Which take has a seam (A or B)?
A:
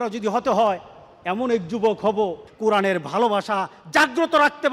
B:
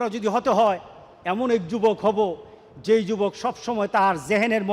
A